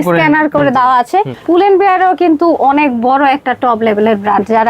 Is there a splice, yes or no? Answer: yes